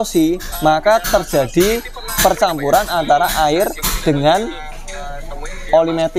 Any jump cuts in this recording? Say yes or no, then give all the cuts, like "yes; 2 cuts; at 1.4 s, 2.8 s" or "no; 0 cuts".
no; 0 cuts